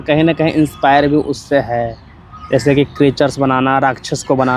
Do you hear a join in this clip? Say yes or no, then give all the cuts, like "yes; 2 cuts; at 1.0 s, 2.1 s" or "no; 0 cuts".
no; 0 cuts